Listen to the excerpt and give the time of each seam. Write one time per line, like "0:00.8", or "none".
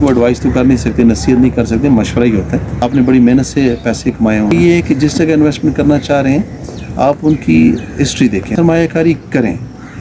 0:02.9
0:04.5
0:08.5